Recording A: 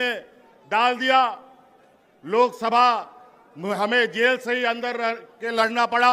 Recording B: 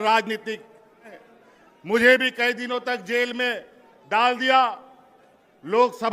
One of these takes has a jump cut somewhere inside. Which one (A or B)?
B